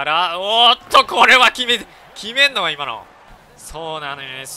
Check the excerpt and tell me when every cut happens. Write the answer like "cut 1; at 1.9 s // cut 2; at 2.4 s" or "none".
cut 1; at 3.3 s